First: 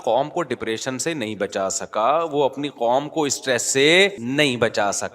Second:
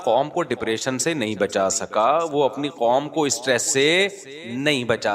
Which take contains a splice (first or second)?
first